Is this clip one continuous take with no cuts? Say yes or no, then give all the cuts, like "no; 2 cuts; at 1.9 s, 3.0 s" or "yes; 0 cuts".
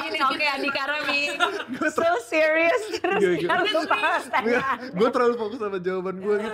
yes; 0 cuts